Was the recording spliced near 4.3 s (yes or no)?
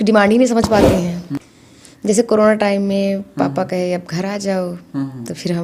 no